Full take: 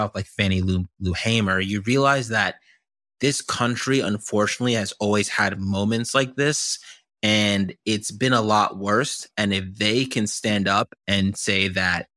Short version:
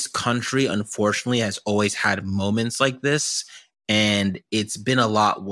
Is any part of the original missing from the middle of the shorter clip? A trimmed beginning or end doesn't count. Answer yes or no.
no